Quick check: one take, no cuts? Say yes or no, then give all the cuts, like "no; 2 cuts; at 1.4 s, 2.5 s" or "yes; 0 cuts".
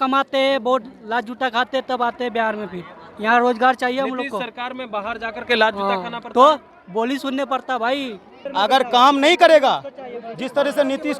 no; 1 cut; at 8.4 s